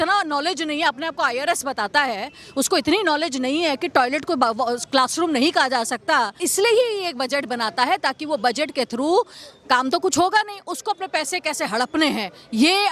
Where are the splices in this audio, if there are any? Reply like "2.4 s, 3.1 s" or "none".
6.4 s